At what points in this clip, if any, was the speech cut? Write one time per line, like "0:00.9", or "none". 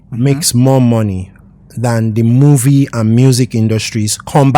none

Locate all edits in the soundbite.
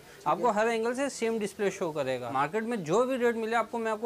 0:02.3

